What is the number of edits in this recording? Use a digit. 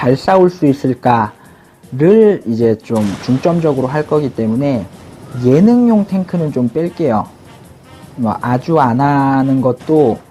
1